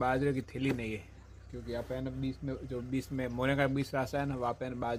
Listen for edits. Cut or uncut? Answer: uncut